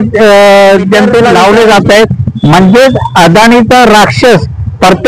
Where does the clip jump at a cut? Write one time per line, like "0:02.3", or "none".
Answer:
0:01.3